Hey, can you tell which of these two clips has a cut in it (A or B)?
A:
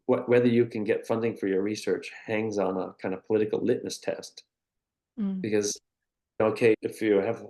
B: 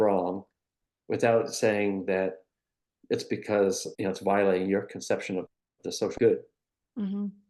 B